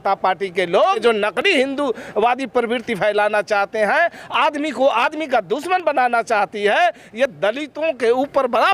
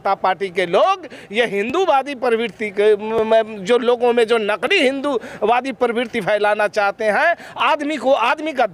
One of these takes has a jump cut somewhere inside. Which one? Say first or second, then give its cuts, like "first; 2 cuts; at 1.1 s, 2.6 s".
first; 1 cut; at 1.0 s